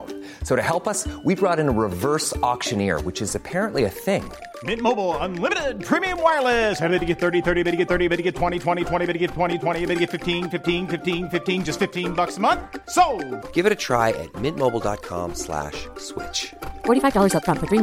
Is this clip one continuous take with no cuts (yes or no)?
yes